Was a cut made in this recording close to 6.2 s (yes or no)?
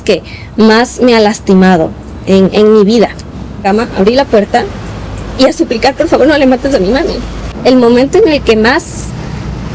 no